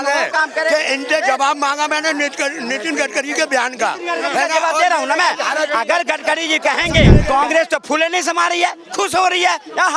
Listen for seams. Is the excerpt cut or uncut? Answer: cut